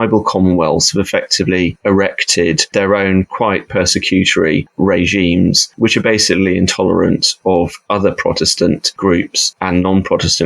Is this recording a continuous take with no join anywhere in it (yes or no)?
yes